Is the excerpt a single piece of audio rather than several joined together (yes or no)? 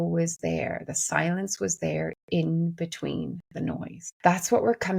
no